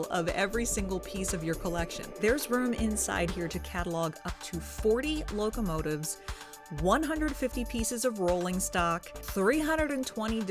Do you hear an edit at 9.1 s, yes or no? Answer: yes